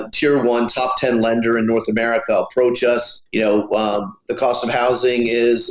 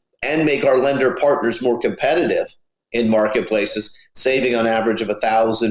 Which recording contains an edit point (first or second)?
first